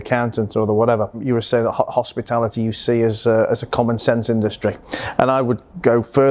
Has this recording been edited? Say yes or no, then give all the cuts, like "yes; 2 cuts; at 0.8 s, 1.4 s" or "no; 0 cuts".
yes; 1 cut; at 1.2 s